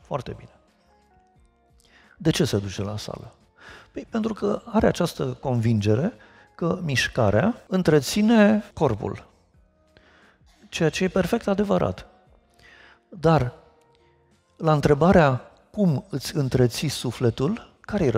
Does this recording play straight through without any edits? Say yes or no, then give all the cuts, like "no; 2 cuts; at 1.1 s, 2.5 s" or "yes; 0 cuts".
no; 2 cuts; at 7.6 s, 8.7 s